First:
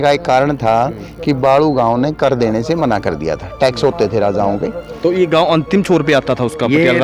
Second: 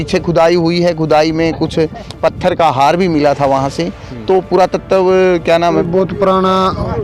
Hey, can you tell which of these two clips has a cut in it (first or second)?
second